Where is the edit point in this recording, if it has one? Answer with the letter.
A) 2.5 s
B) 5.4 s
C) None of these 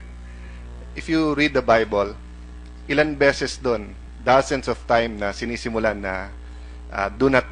C